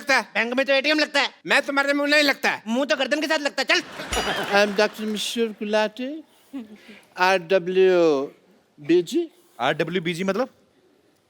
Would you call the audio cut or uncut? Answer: cut